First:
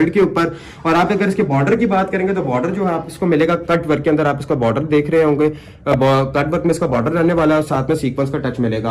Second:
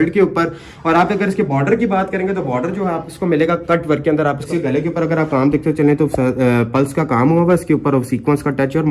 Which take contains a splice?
second; 1 cut; at 4.4 s

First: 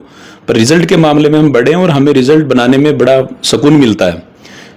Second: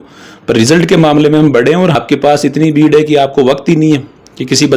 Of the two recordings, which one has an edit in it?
second; 1 cut; at 1.9 s

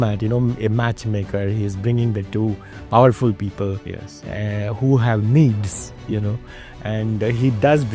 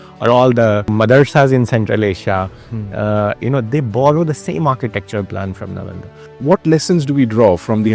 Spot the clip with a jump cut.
second; 2 cuts; at 0.9 s, 6.4 s

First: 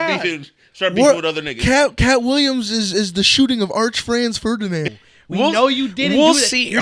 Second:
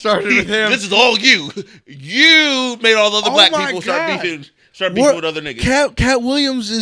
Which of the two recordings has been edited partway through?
first; 1 cut; at 4.9 s

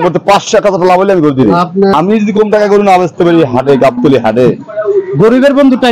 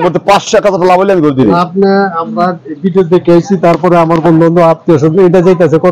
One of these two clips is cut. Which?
first; 1 cut; at 1.9 s

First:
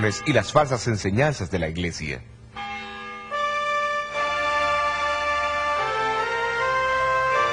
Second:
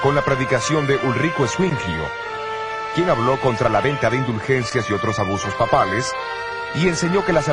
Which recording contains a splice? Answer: first; 1 cut; at 6.6 s

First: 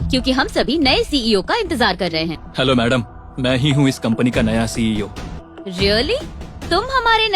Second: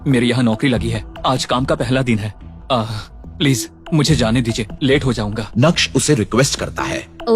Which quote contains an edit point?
first; 2 cuts; at 2.4 s, 5.3 s

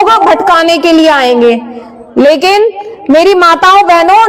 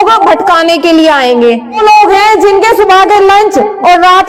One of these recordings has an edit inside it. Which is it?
second; 1 cut; at 1.8 s

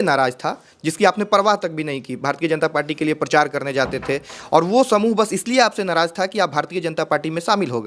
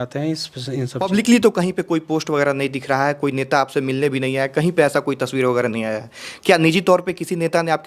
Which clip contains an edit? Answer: second; 1 cut; at 1.0 s

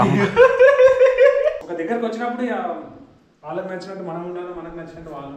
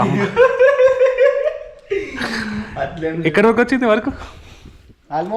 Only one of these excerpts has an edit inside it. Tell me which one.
first; 1 cut; at 1.6 s

